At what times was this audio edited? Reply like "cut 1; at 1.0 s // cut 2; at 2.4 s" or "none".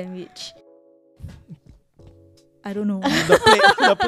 none